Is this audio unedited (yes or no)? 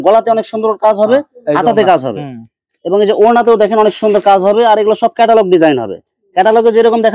yes